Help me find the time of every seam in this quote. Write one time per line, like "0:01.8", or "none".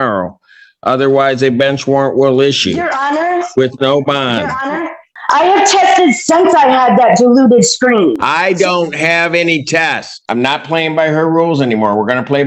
0:05.1
0:10.2